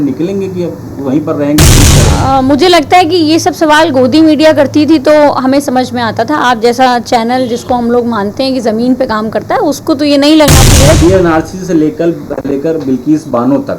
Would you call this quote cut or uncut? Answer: cut